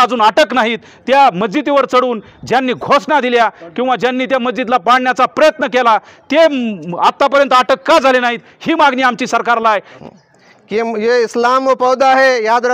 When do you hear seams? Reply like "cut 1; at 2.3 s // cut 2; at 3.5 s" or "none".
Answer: cut 1; at 9.9 s